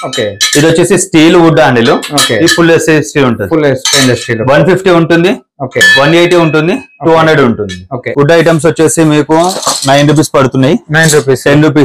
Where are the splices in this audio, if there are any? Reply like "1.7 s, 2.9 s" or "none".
8.0 s